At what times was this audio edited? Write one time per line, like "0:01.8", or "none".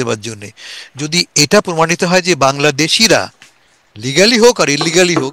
none